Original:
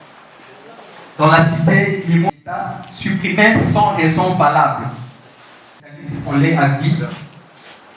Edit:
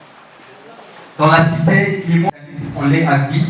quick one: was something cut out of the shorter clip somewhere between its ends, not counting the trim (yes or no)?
yes